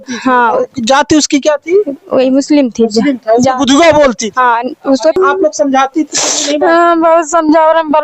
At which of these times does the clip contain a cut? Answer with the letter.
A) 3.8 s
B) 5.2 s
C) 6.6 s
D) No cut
B